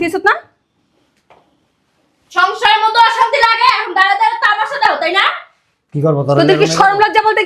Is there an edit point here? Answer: no; 0 cuts

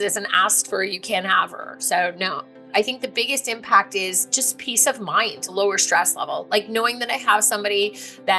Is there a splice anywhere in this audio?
yes; 2 cuts; at 2.5 s, 5.5 s

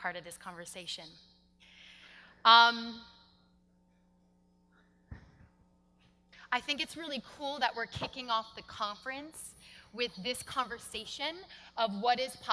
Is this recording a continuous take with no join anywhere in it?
yes; 0 cuts

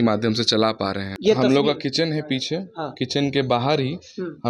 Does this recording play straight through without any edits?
no; 1 cut; at 1.1 s

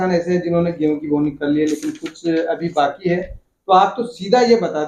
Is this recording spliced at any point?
no; 0 cuts

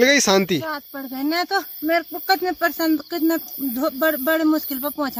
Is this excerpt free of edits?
yes; 0 cuts

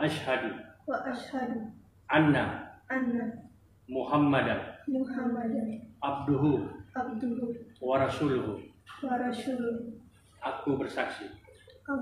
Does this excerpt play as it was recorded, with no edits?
yes; 0 cuts

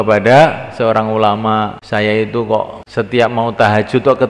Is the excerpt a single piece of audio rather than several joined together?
no; 2 cuts; at 1.8 s, 2.8 s

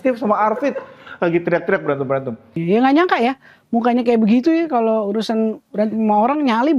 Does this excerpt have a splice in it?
yes; 1 cut; at 2.6 s

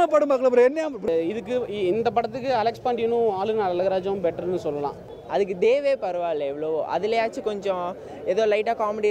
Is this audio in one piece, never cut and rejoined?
no; 2 cuts; at 1.1 s, 5.2 s

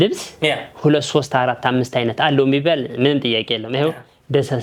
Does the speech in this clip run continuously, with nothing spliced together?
yes; 0 cuts

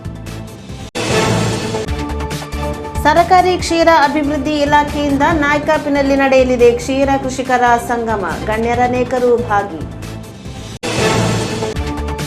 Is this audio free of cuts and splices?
no; 2 cuts; at 0.9 s, 2.7 s

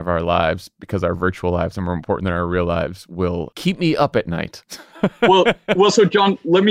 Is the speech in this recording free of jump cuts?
no; 1 cut; at 3.5 s

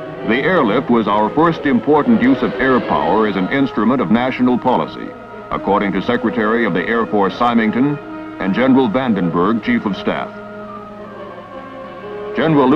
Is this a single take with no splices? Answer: no; 1 cut; at 11.6 s

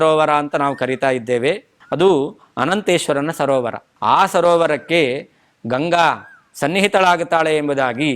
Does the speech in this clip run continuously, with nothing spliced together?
no; 1 cut; at 1.8 s

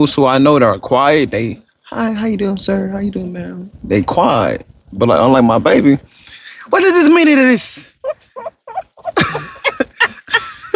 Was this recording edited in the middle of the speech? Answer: no; 0 cuts

